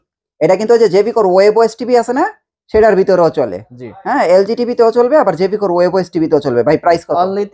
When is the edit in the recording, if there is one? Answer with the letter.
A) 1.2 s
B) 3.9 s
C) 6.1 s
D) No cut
D